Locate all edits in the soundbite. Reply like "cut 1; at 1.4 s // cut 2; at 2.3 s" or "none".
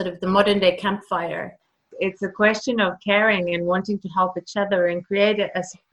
cut 1; at 1.9 s